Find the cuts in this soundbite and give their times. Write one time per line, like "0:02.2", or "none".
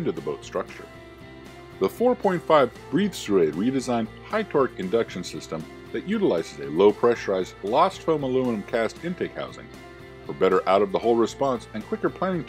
0:07.3

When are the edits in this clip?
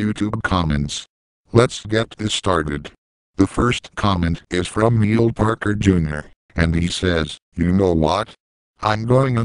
none

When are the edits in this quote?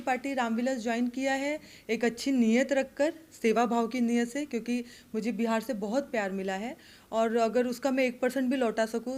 none

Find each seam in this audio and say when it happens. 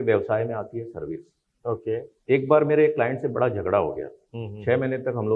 0:02.1

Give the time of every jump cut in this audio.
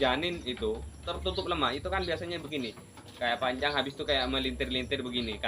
0:01.0

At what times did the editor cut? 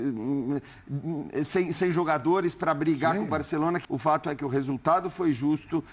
0:03.8

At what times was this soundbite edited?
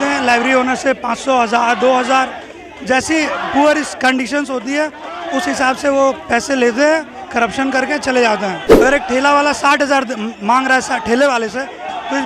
0:08.7

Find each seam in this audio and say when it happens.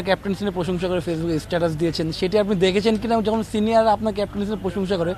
none

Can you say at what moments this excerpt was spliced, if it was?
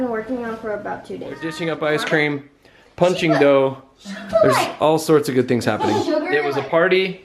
0:01.5
0:06.3

